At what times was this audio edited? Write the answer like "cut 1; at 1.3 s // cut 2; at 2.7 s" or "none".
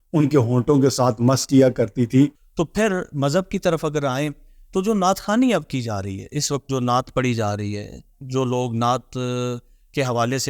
cut 1; at 2.4 s